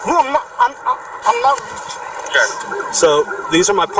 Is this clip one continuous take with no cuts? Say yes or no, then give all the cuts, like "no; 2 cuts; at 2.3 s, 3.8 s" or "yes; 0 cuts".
no; 1 cut; at 2.6 s